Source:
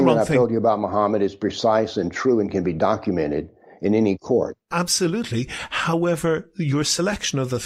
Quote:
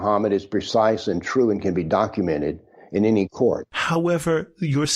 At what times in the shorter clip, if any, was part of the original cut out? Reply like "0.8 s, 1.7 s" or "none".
3.7 s

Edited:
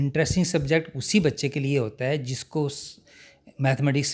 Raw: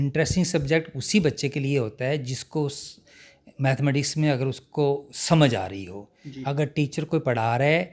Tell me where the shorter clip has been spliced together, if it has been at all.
none

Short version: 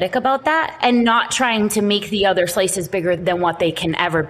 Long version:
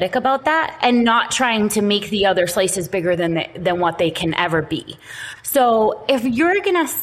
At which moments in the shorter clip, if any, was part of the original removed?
3.2 s

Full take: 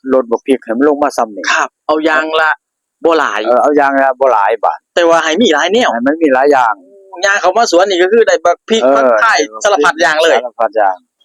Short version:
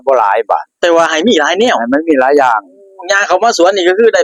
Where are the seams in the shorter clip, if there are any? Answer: none

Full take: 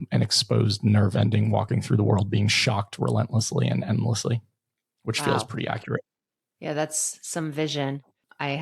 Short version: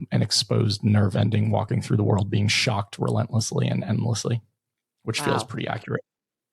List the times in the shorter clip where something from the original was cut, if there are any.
none

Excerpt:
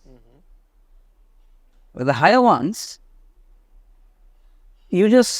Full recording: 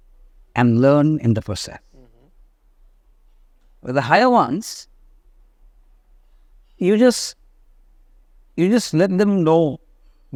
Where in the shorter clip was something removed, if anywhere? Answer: none

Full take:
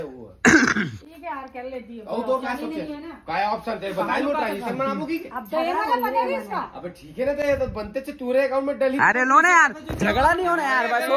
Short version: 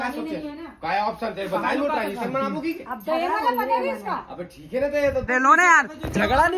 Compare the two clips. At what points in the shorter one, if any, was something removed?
5.3 s

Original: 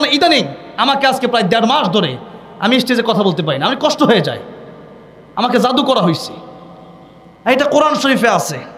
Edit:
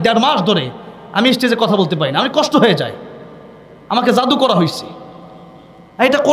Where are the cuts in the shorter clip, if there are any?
none

